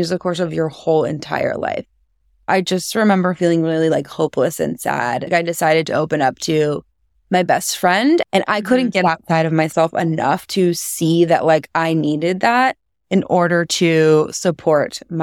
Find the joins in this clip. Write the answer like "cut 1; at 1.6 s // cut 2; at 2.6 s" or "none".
cut 1; at 2.4 s // cut 2; at 5.3 s // cut 3; at 8.3 s